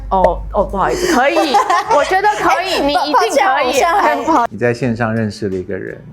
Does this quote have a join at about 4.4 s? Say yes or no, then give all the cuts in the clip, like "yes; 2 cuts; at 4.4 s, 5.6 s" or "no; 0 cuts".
yes; 1 cut; at 4.4 s